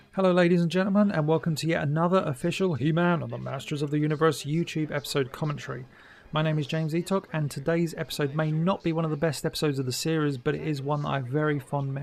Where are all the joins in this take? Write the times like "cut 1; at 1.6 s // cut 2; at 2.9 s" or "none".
none